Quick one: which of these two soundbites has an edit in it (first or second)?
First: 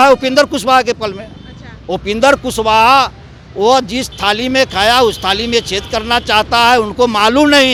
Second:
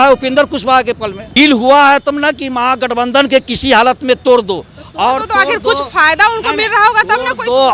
second